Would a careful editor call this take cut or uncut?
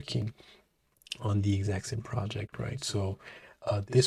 uncut